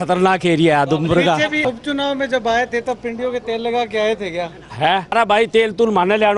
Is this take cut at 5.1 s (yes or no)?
yes